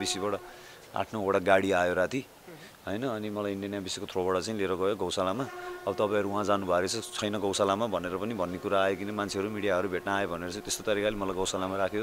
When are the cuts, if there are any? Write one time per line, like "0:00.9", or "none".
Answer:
none